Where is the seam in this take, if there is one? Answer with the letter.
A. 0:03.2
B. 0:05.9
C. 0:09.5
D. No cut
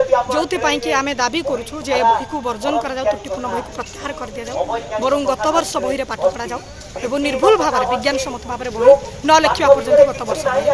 D